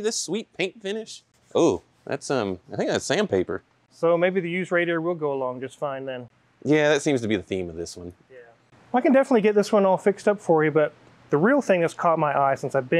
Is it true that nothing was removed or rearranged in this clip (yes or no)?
yes